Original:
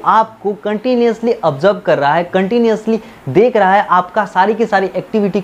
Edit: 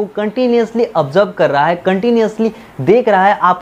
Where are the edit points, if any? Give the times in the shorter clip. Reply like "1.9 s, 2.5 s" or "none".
none